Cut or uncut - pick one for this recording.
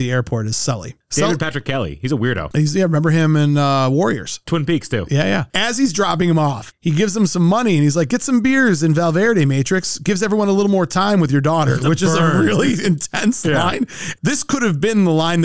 uncut